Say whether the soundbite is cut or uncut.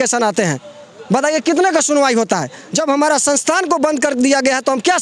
uncut